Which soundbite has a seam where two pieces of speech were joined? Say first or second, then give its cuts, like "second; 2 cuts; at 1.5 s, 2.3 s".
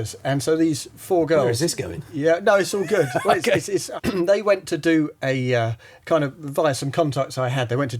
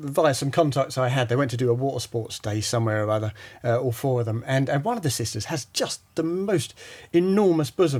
first; 1 cut; at 3.9 s